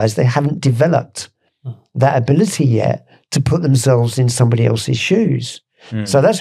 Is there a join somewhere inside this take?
no; 0 cuts

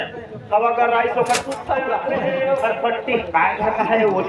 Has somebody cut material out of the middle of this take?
yes; 1 cut; at 2.1 s

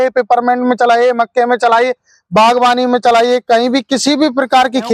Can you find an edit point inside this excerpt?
no; 0 cuts

